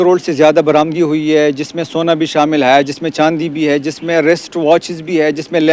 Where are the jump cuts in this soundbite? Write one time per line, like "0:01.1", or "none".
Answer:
none

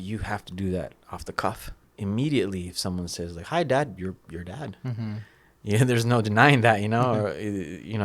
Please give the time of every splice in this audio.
0:01.9

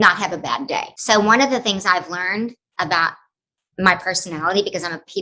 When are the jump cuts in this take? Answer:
0:00.9

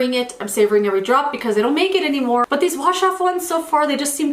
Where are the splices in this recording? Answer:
0:02.5

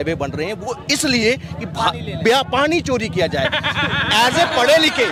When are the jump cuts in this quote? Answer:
none

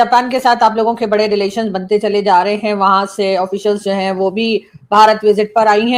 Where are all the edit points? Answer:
none

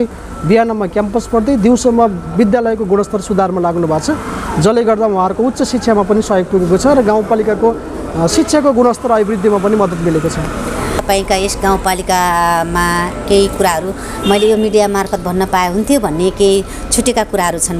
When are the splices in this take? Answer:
none

